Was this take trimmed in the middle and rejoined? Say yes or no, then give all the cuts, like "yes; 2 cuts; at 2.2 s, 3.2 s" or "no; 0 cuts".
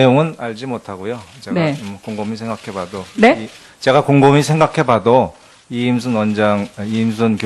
no; 0 cuts